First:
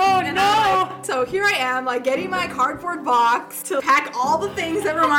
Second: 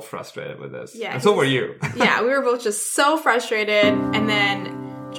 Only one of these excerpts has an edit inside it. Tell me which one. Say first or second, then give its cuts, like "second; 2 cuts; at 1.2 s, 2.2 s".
first; 2 cuts; at 1.0 s, 3.8 s